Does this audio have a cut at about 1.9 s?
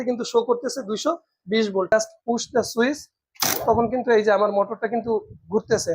yes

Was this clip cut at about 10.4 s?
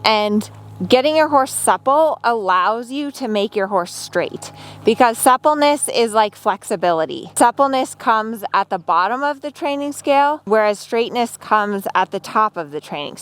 yes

